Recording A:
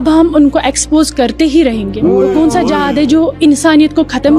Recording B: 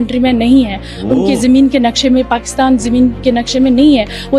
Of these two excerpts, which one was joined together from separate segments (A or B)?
A